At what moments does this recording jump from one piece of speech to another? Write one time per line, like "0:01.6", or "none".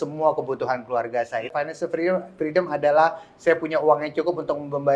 0:01.5